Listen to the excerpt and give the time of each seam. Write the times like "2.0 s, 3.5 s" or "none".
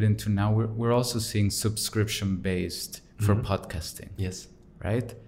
none